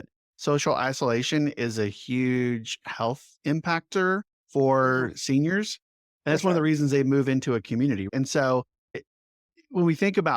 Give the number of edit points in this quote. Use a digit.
2